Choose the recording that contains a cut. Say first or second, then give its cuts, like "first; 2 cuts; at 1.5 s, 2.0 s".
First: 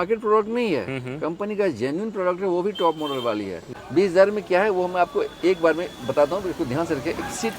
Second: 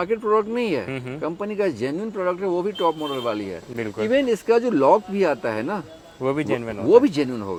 first; 1 cut; at 3.8 s